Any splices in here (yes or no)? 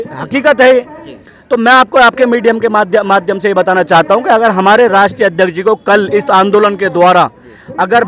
no